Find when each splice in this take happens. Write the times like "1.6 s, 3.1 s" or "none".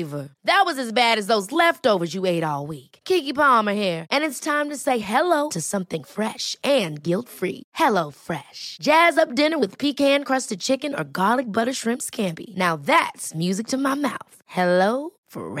none